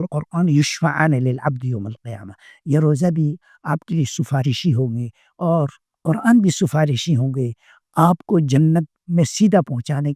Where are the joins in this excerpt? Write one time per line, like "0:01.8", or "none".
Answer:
none